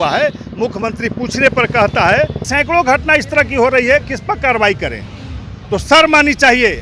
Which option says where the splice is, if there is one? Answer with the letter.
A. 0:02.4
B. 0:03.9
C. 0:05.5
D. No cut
A